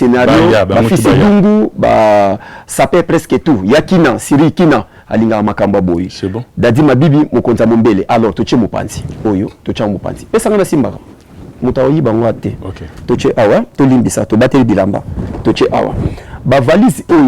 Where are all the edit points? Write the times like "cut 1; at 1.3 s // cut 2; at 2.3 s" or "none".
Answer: none